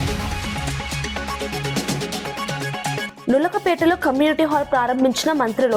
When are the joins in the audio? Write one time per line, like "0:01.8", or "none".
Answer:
0:03.1